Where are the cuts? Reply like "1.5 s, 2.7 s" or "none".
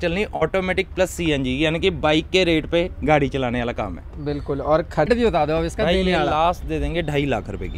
5.1 s